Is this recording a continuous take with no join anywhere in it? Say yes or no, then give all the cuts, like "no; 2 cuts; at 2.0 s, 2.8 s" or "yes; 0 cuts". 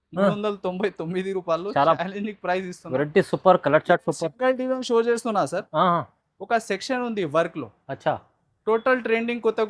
yes; 0 cuts